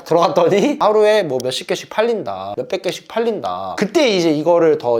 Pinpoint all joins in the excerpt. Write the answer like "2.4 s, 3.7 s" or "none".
0.8 s, 2.5 s